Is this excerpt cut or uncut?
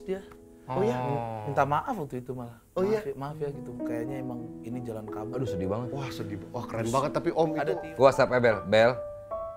cut